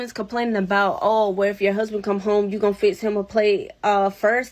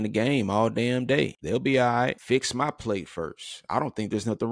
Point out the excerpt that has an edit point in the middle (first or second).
second